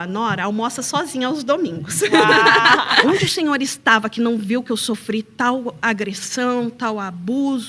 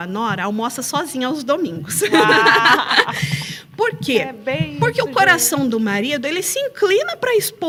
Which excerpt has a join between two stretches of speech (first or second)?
first